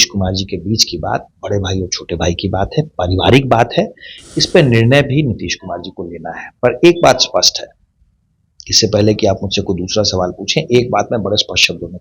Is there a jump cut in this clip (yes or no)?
no